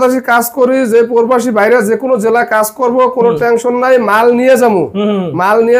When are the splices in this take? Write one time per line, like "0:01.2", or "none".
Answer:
none